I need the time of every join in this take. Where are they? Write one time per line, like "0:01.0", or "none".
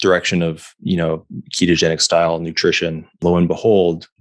0:03.2